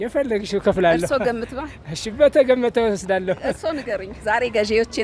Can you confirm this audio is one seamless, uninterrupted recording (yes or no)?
yes